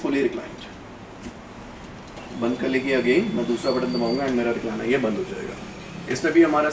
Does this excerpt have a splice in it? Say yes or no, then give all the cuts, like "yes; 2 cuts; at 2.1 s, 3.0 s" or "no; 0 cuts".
no; 0 cuts